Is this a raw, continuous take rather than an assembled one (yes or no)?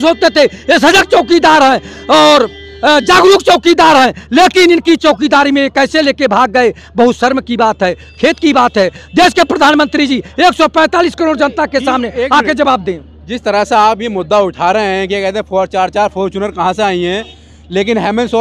yes